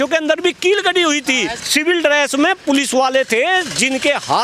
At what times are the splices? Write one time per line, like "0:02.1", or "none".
0:01.6